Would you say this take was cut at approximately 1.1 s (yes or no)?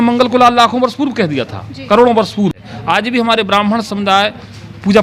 no